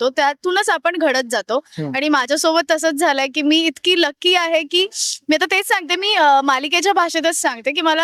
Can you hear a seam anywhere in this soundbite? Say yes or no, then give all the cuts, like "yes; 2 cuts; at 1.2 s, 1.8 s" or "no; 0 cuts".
no; 0 cuts